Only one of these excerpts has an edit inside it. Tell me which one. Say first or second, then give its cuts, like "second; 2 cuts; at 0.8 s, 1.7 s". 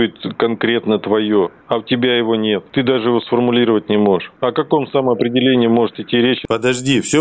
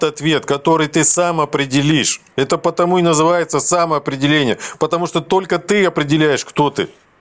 first; 4 cuts; at 1.6 s, 2.7 s, 4.3 s, 6.4 s